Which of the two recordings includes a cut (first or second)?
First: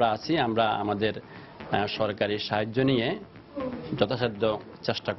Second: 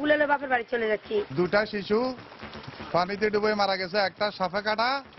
second